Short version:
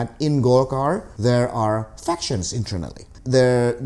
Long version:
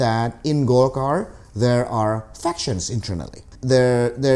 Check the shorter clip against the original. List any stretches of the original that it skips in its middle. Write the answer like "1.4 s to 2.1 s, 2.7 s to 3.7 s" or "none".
1.3 s to 1.5 s